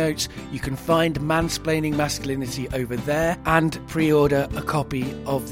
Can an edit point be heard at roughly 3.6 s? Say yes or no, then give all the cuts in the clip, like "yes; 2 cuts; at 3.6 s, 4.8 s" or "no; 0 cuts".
yes; 1 cut; at 3.6 s